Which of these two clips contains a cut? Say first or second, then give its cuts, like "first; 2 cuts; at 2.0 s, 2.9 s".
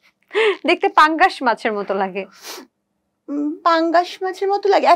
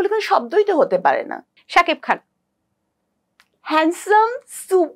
second; 1 cut; at 1.6 s